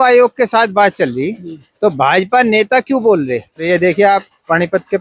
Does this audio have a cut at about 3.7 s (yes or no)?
yes